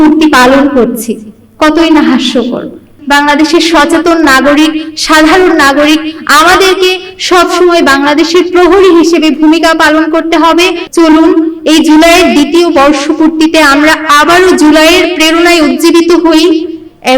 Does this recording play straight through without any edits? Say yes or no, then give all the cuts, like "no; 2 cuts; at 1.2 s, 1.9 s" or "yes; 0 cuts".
no; 2 cuts; at 2.9 s, 10.8 s